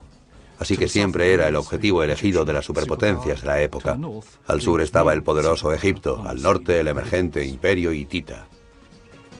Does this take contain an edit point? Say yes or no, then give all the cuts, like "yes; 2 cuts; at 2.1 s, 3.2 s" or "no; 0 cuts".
yes; 1 cut; at 3.6 s